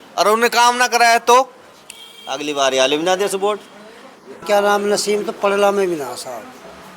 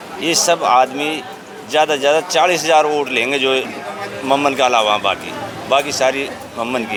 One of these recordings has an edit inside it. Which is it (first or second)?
first